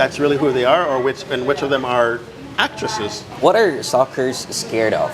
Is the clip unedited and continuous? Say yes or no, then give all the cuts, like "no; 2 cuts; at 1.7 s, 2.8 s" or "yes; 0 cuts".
no; 1 cut; at 3.2 s